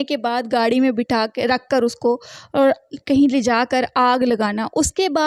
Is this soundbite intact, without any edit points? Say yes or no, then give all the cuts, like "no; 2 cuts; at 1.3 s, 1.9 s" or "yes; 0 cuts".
yes; 0 cuts